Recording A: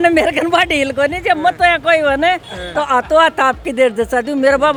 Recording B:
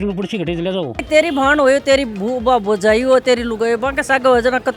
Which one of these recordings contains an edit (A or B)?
B